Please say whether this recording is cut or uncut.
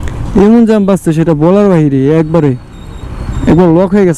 uncut